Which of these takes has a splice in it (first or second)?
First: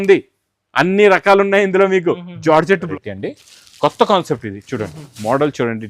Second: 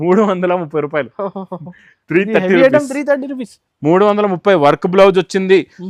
first